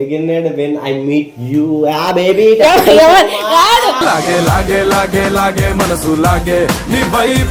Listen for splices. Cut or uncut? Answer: uncut